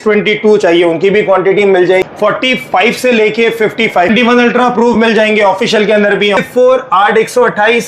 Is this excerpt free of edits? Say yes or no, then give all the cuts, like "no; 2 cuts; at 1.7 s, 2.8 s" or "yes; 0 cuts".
no; 3 cuts; at 2.0 s, 4.1 s, 6.4 s